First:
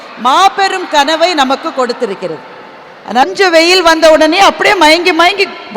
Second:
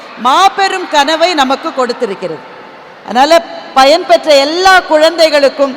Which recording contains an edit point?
first; 1 cut; at 3.2 s

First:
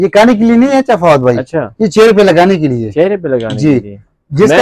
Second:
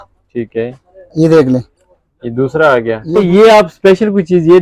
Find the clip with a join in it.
second; 1 cut; at 3.0 s

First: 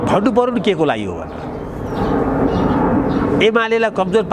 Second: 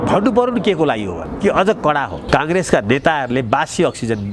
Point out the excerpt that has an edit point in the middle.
second; 2 cuts; at 1.3 s, 2.2 s

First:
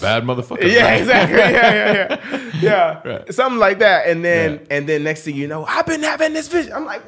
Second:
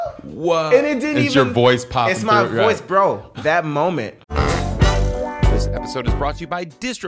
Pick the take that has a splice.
second; 2 cuts; at 3.3 s, 4.2 s

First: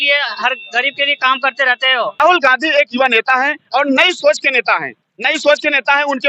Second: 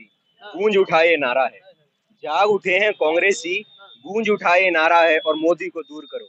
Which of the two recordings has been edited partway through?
first; 1 cut; at 2.1 s

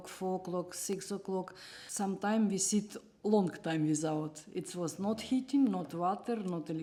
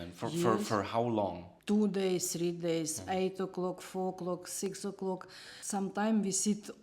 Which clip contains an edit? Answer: second; 1 cut; at 1.5 s

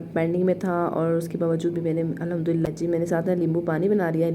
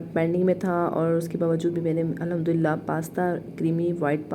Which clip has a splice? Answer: first; 1 cut; at 2.7 s

